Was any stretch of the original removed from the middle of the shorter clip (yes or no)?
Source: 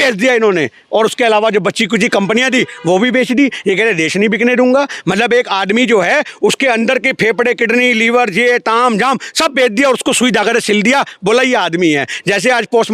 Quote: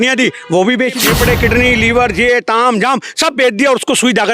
yes